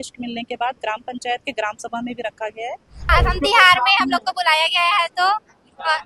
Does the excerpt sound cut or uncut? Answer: cut